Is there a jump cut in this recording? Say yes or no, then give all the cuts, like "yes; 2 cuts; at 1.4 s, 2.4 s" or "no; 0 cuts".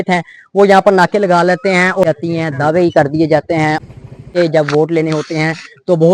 yes; 2 cuts; at 2.0 s, 3.8 s